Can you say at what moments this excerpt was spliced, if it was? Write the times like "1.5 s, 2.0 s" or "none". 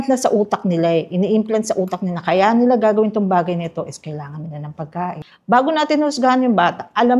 5.3 s